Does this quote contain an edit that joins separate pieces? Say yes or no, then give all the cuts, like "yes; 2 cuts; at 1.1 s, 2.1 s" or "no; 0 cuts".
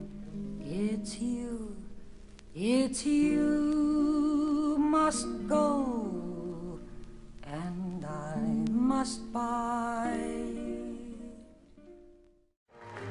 yes; 1 cut; at 1.1 s